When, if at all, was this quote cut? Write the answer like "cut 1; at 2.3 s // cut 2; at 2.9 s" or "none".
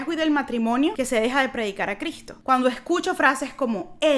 cut 1; at 0.9 s // cut 2; at 2.3 s